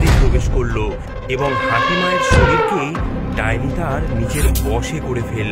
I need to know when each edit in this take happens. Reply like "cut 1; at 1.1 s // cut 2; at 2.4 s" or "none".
none